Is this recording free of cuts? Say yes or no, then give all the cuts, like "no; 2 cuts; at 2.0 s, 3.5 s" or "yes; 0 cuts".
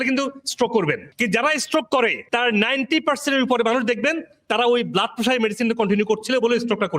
no; 2 cuts; at 1.1 s, 2.2 s